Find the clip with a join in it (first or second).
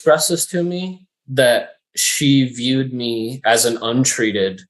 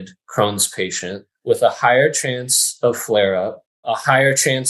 second